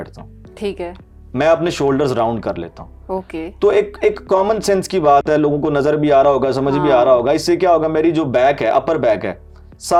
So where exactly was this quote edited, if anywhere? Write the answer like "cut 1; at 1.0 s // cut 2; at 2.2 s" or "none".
none